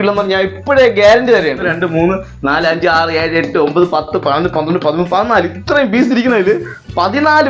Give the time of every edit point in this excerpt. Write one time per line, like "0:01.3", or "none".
0:01.7